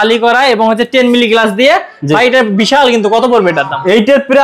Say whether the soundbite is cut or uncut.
uncut